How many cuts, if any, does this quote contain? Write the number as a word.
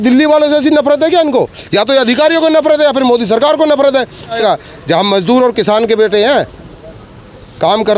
one